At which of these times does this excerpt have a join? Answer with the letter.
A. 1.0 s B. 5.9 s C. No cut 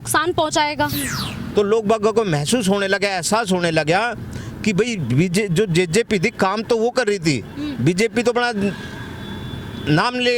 A